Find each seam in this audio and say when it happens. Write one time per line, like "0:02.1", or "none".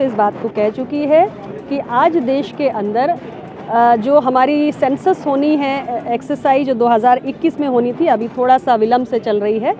none